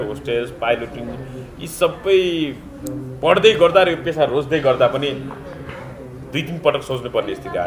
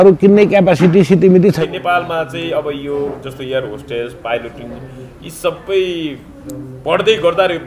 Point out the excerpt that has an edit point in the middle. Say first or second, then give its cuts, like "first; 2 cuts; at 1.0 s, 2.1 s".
second; 1 cut; at 1.6 s